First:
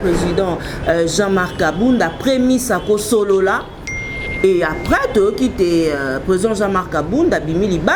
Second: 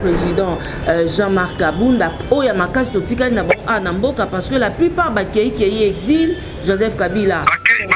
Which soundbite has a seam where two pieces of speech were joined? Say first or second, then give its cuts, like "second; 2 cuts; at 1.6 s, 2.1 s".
second; 1 cut; at 2.2 s